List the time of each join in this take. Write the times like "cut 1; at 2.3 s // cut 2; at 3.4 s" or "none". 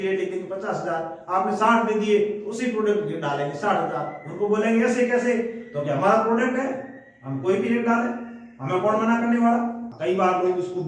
cut 1; at 9.9 s

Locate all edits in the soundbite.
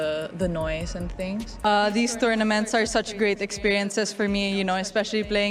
cut 1; at 1.9 s

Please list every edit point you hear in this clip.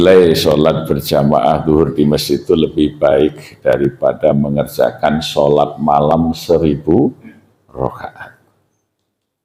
none

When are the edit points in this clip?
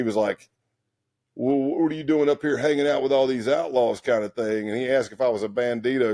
none

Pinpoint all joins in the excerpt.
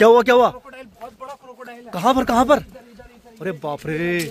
none

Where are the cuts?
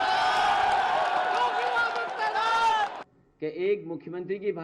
cut 1; at 2.9 s

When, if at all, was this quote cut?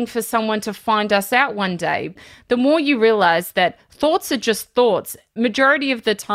cut 1; at 2.1 s // cut 2; at 5.3 s

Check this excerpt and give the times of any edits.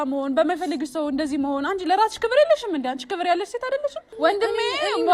cut 1; at 4.1 s

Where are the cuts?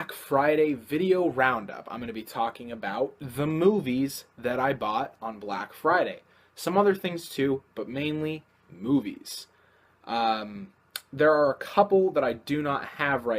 cut 1; at 4.2 s

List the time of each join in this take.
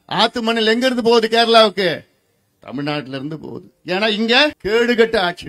cut 1; at 4.6 s

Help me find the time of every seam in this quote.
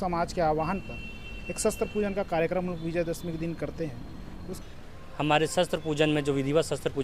cut 1; at 4.5 s

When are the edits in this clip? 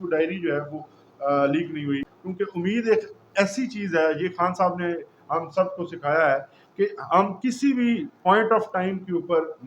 cut 1; at 2.0 s

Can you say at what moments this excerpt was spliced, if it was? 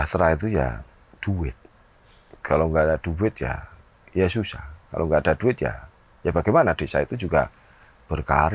none

